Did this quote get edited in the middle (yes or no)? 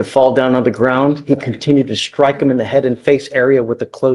no